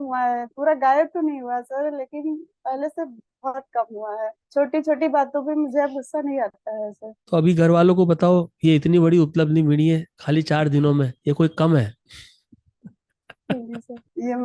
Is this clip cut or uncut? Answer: uncut